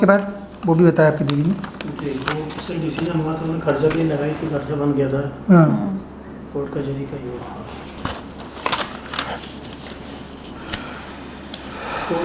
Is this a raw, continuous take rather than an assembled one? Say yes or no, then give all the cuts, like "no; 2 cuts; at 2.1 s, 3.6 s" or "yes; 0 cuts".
yes; 0 cuts